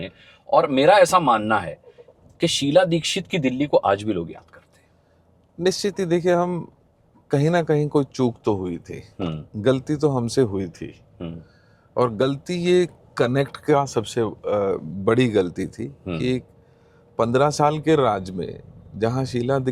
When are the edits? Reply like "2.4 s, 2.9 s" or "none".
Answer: none